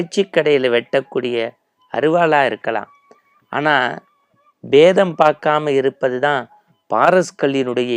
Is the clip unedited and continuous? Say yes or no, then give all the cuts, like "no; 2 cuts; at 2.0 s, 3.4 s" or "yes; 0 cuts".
yes; 0 cuts